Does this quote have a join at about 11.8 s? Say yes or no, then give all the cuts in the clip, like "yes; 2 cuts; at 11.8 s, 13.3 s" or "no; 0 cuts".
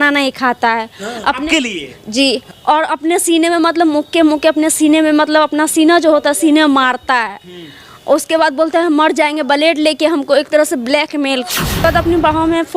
yes; 2 cuts; at 2.5 s, 11.8 s